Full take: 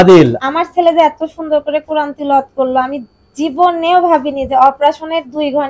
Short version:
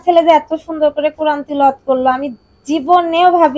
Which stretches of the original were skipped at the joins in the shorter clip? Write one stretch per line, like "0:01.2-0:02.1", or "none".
none